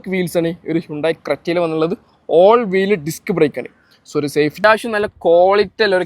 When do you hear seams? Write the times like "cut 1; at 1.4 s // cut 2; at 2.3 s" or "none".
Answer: cut 1; at 4.6 s